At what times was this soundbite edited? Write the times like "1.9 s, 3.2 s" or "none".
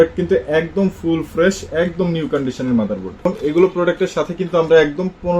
3.3 s